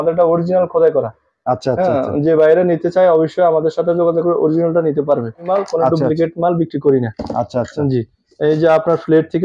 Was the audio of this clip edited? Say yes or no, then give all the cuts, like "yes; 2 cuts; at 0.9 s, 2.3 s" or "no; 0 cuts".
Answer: yes; 1 cut; at 5.5 s